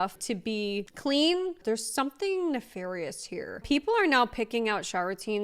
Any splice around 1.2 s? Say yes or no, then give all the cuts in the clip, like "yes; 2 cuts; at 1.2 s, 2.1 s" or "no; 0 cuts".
no; 1 cut; at 3.6 s